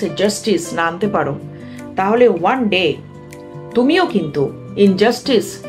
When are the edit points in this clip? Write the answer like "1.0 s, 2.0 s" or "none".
none